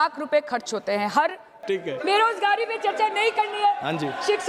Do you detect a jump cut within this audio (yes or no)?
yes